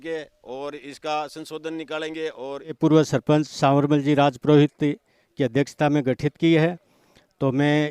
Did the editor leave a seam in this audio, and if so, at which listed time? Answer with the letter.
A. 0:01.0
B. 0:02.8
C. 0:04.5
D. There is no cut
B